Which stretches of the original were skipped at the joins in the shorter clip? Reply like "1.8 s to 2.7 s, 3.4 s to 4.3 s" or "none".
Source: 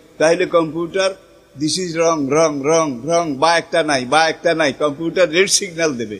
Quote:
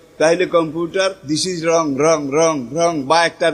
1.2 s to 1.5 s